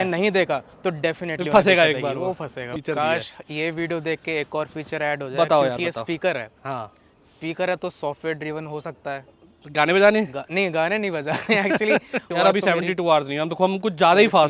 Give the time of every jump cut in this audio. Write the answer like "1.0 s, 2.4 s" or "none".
2.8 s, 12.2 s

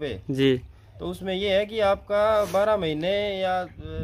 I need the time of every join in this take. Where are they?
none

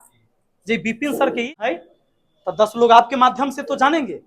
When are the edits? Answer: 1.5 s

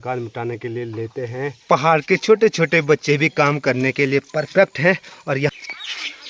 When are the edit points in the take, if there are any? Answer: 1.6 s, 5.5 s

